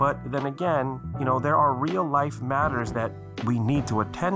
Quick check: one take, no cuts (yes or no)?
no